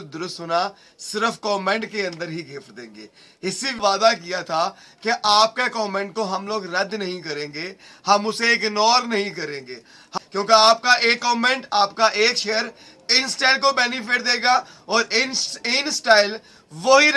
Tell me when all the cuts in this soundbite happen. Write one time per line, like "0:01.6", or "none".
0:03.8
0:10.0